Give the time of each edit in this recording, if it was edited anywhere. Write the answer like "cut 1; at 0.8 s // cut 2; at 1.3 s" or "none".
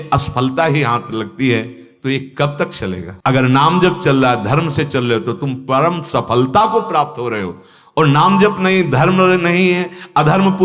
cut 1; at 3.1 s